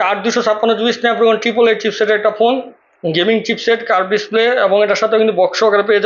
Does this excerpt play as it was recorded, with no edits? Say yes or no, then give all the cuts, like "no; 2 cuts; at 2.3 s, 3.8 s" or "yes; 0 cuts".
yes; 0 cuts